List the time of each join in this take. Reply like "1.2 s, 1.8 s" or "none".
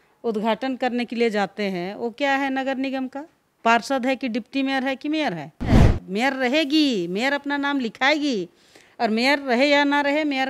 5.9 s